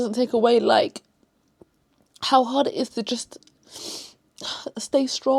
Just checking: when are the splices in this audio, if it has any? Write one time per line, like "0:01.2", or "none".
none